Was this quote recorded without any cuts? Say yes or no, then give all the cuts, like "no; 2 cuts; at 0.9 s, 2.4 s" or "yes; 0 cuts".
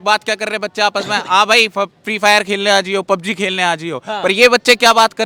yes; 0 cuts